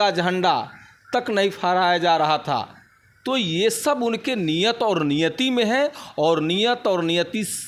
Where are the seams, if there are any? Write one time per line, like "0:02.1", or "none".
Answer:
none

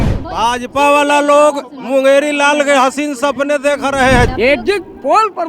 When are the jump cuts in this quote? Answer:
0:04.3

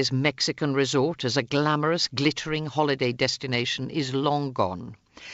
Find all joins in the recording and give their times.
none

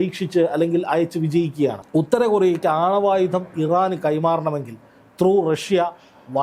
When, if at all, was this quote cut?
0:01.8

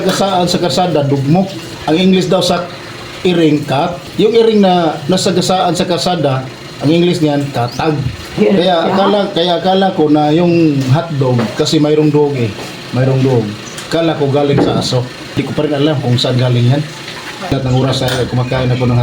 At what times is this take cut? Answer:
0:01.7
0:04.0
0:08.4
0:15.2
0:17.5

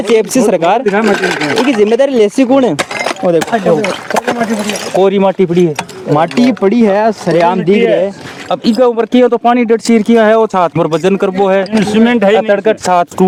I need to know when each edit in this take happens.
none

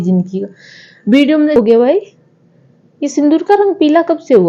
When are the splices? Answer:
0:01.6

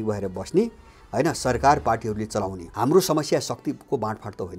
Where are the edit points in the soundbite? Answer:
0:02.6

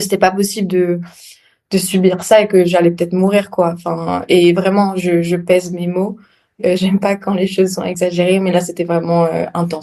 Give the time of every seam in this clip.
0:06.5
0:07.9

